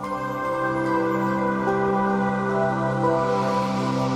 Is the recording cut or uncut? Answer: uncut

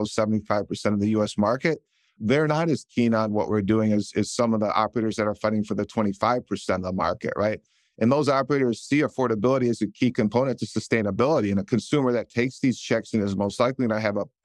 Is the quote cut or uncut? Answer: uncut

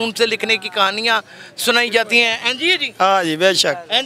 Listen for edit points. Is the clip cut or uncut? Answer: uncut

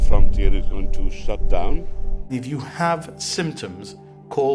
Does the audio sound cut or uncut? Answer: cut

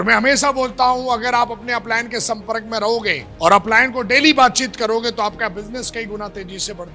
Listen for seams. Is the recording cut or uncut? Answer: cut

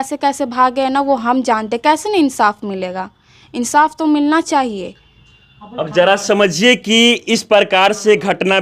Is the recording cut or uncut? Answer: uncut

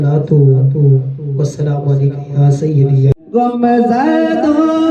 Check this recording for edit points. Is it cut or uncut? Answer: cut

